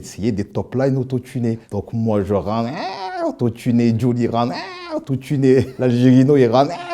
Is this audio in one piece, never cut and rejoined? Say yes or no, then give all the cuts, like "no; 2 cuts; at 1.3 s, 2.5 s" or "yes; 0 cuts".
no; 2 cuts; at 1.7 s, 5.7 s